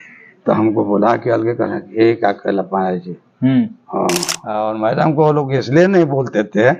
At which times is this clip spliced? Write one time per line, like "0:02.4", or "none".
0:04.5

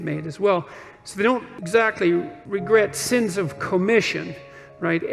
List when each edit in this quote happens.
0:01.5
0:02.4

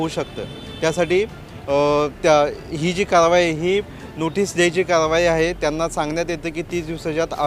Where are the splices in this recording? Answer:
none

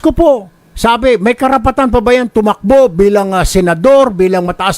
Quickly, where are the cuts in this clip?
0:03.1

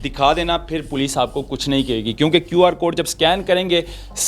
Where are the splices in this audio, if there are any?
none

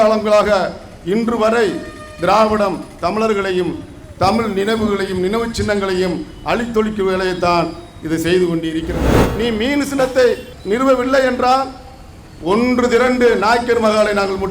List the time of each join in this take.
0:09.1

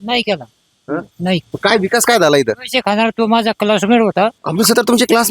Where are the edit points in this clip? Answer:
0:01.5
0:04.4

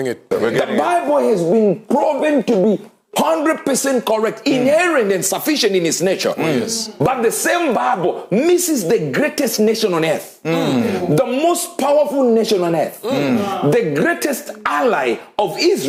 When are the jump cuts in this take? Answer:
none

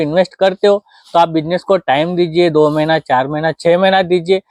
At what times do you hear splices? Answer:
none

